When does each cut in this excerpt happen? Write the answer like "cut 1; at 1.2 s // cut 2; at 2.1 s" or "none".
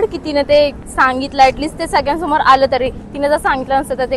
none